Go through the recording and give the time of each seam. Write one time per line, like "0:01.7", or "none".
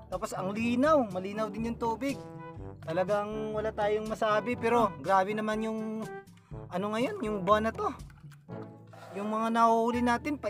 0:05.0